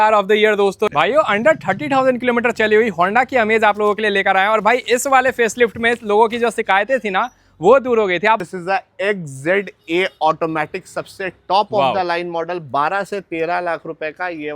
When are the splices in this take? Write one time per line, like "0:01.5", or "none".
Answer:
0:00.9
0:08.4